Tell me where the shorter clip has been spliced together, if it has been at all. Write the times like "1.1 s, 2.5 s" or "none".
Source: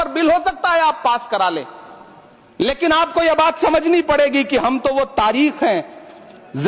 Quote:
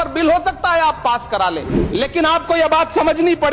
1.7 s